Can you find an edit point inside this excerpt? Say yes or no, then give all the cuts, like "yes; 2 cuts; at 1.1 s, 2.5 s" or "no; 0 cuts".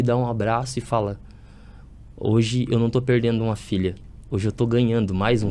no; 0 cuts